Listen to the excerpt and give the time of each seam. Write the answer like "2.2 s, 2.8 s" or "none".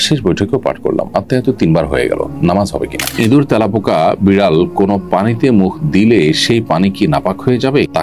3.0 s